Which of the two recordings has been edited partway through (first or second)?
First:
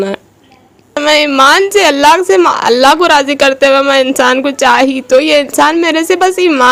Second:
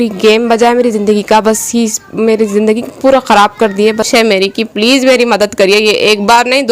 second